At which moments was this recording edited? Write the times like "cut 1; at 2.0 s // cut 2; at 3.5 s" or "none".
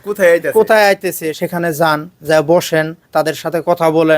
cut 1; at 1.3 s